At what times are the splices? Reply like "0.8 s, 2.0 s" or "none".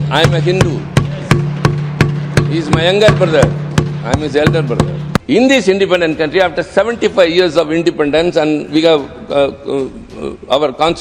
5.1 s